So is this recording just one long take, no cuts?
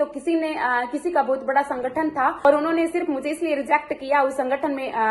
no; 1 cut; at 2.4 s

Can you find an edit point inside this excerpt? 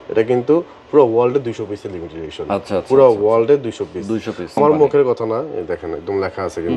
yes; 1 cut; at 4.5 s

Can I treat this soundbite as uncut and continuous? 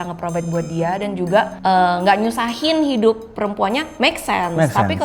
no; 1 cut; at 1.5 s

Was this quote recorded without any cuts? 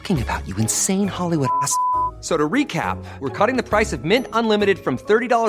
yes; 0 cuts

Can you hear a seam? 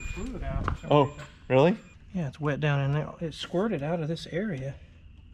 no; 0 cuts

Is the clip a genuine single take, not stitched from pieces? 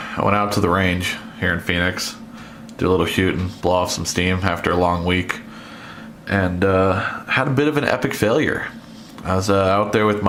yes; 0 cuts

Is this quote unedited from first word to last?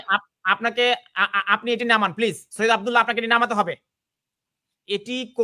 yes; 0 cuts

